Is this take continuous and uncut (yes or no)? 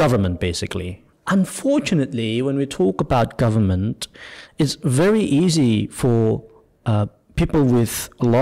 no